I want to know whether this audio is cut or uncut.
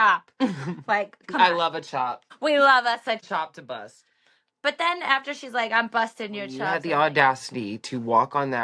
cut